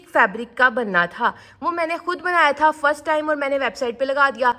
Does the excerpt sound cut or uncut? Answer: uncut